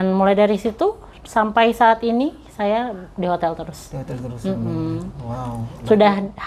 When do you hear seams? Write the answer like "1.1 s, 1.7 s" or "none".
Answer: none